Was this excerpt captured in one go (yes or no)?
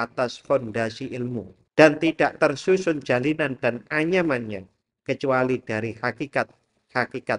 no